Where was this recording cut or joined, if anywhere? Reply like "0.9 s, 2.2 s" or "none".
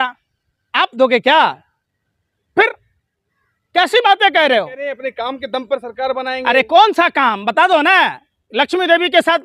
4.8 s